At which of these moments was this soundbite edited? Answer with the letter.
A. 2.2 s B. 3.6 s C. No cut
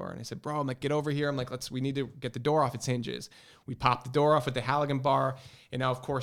C